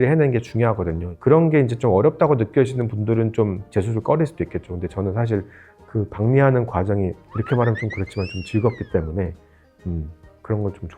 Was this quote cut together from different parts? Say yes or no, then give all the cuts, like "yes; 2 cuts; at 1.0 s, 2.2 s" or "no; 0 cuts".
no; 0 cuts